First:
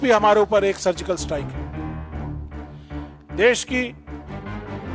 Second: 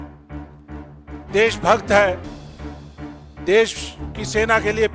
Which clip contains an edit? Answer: first; 1 cut; at 3.9 s

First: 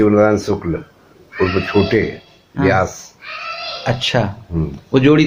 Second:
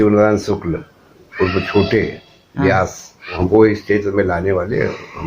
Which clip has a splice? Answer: second; 1 cut; at 3.2 s

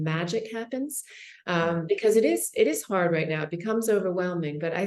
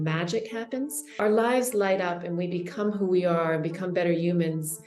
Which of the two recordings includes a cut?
second; 1 cut; at 1.0 s

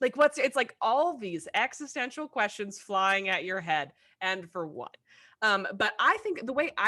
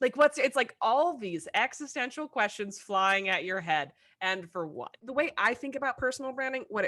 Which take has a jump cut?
second; 1 cut; at 5.0 s

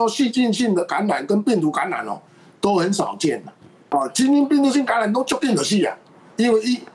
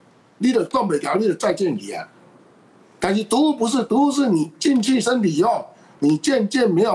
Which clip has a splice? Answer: first; 1 cut; at 3.7 s

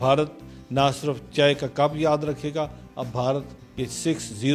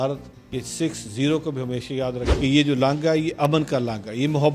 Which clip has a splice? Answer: second; 1 cut; at 2.2 s

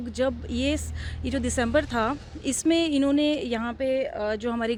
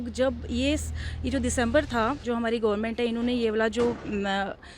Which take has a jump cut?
second; 1 cut; at 2.2 s

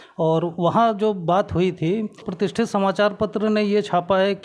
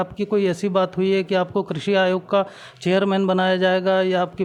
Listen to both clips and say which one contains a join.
first; 1 cut; at 2.3 s

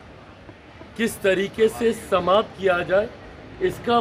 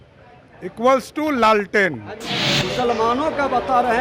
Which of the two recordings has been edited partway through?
second; 1 cut; at 2.3 s

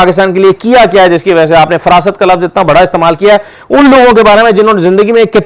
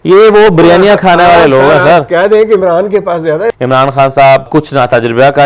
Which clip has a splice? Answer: second; 2 cuts; at 3.5 s, 4.5 s

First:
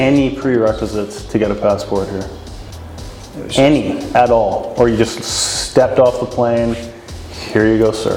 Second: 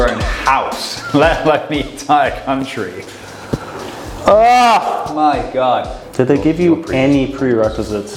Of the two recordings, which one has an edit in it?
second; 1 cut; at 6.0 s

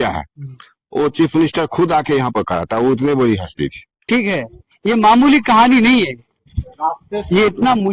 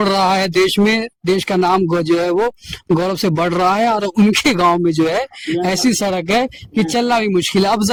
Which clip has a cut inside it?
first; 1 cut; at 3.9 s

